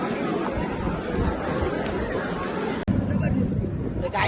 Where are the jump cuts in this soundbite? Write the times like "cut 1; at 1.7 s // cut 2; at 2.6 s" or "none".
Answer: cut 1; at 2.9 s